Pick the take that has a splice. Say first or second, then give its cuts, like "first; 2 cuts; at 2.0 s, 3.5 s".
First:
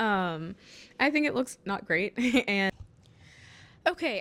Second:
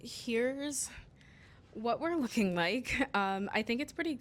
first; 1 cut; at 2.7 s